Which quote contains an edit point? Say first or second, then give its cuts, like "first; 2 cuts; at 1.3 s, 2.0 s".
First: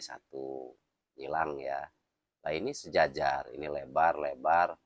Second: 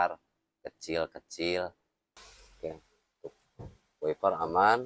second; 1 cut; at 2.2 s